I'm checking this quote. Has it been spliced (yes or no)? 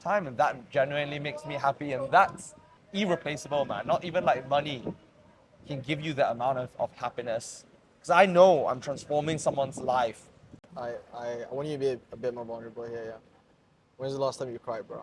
no